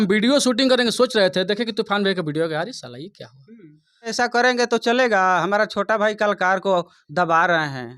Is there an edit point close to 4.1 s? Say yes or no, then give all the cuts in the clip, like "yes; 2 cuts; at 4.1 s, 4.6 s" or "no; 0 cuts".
yes; 1 cut; at 4.1 s